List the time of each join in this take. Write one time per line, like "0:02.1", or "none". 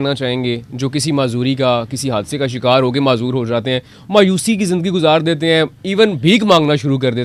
none